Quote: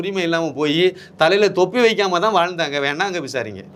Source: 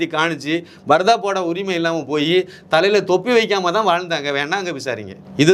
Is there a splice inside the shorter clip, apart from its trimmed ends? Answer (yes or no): no